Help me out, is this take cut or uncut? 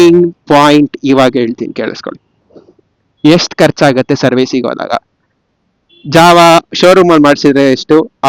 uncut